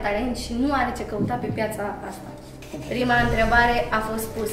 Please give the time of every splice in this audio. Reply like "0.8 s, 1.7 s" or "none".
none